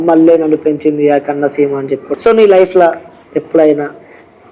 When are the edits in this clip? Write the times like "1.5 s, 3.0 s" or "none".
2.1 s